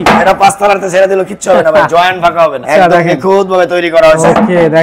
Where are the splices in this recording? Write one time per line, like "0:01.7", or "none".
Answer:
none